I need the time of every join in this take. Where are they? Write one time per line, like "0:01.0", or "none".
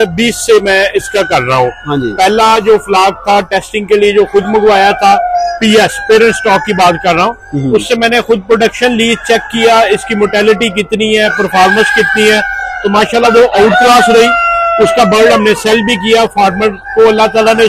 none